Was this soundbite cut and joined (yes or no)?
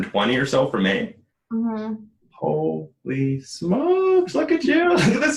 no